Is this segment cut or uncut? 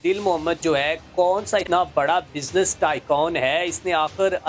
cut